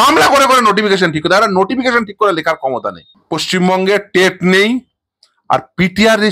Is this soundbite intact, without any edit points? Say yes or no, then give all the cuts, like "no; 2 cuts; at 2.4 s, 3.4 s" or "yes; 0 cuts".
no; 1 cut; at 3.1 s